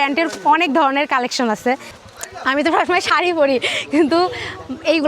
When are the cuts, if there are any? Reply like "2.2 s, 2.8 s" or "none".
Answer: 1.9 s